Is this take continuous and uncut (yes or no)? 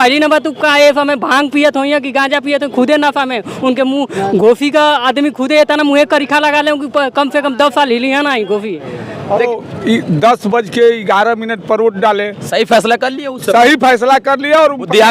no